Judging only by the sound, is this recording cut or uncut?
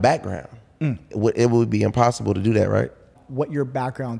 cut